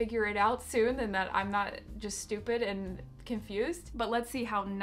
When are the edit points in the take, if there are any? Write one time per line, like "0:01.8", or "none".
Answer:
0:03.9